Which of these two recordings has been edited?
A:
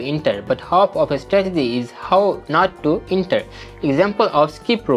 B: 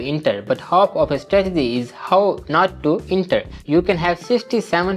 B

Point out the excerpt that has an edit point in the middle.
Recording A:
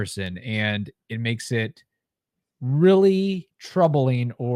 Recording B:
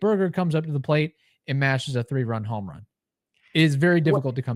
A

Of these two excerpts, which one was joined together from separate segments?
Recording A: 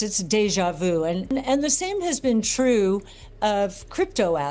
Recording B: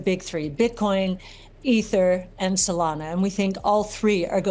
A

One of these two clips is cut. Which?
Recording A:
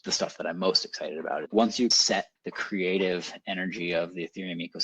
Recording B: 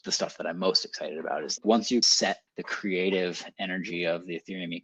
A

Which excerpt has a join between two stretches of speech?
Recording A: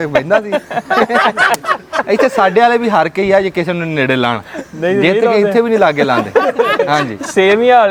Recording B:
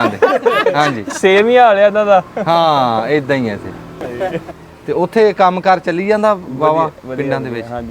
B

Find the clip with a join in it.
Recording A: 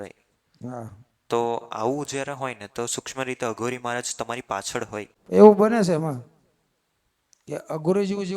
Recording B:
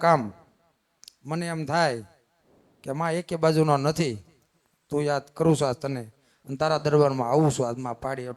A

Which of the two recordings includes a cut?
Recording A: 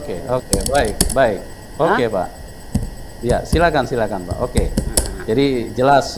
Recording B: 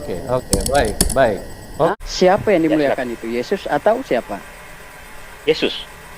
B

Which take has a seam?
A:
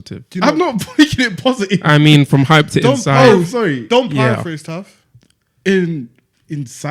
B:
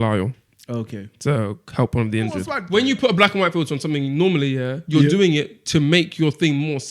B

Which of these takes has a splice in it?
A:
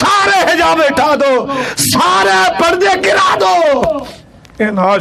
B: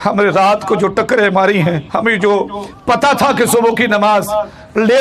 B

